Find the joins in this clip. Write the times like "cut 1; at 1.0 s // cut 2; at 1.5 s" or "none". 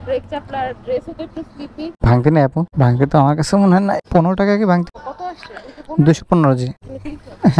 none